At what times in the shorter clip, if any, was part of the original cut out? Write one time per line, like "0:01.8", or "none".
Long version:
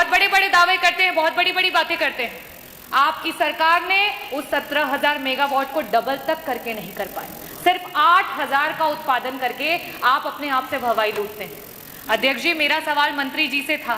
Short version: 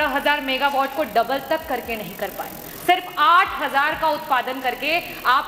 none